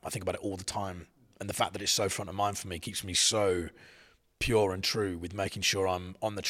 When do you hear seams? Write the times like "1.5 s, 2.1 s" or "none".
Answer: none